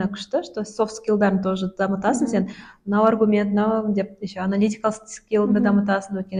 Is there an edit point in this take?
no; 0 cuts

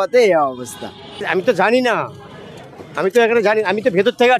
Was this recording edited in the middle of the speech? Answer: yes; 1 cut; at 1.3 s

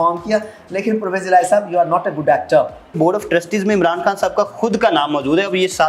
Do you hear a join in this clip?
yes; 1 cut; at 3.0 s

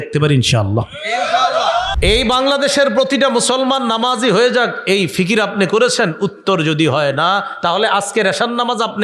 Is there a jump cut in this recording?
yes; 1 cut; at 1.9 s

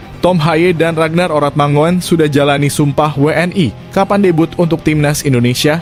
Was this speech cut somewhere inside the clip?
no; 0 cuts

